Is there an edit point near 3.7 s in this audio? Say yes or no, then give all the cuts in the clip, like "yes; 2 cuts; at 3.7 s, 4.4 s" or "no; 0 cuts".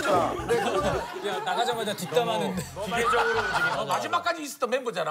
yes; 1 cut; at 3.7 s